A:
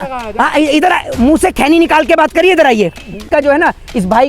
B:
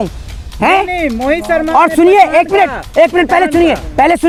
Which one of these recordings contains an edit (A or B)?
A